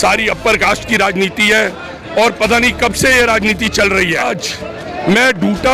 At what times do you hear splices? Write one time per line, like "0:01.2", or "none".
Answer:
0:04.3